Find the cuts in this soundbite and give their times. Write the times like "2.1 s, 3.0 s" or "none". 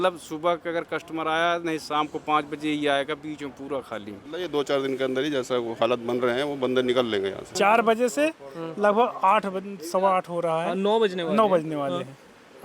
4.3 s, 7.5 s